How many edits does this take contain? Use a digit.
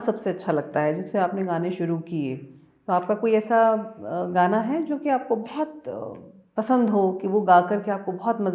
0